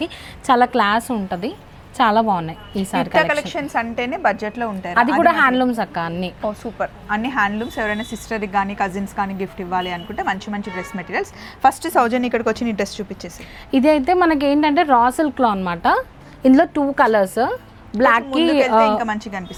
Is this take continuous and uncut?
yes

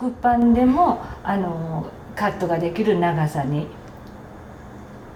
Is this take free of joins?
yes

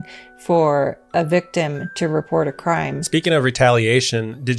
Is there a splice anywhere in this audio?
yes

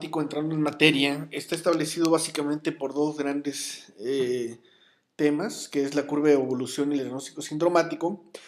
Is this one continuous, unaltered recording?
yes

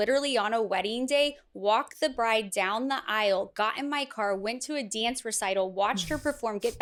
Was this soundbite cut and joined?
no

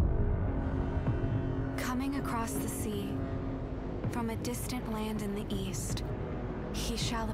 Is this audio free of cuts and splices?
no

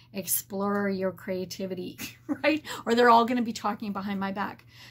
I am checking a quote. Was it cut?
yes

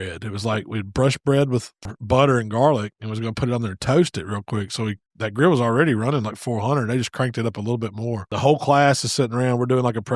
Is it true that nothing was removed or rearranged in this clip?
no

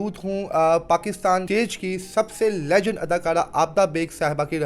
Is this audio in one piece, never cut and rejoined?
no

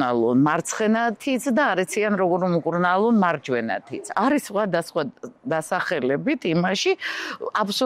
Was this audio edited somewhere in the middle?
yes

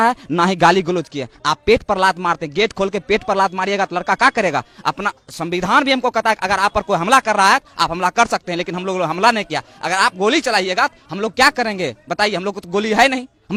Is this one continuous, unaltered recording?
yes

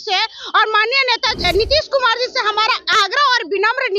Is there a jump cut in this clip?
yes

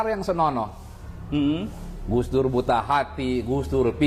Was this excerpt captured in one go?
yes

